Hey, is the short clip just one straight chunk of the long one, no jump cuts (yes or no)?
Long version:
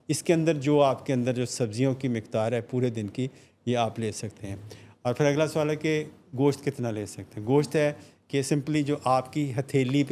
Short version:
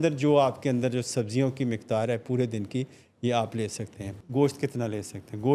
no